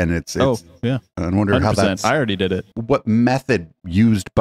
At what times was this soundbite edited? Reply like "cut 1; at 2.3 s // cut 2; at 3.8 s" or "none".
cut 1; at 2.7 s